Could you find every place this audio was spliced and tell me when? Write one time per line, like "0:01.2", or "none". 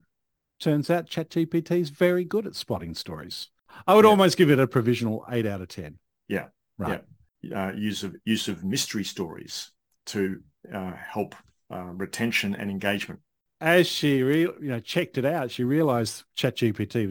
0:03.7
0:07.4
0:13.5